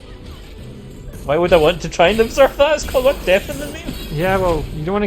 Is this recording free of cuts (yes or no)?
yes